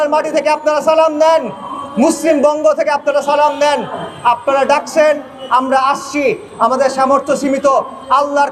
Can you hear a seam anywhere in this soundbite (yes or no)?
no